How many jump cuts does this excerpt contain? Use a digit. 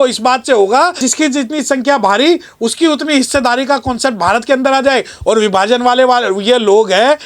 1